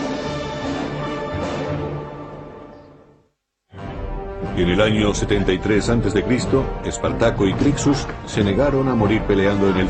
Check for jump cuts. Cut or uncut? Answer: uncut